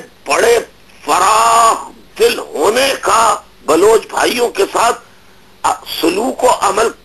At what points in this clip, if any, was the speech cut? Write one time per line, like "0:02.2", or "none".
none